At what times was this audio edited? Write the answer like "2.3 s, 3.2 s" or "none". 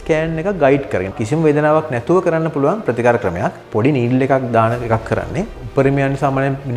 1.2 s, 3.6 s, 5.6 s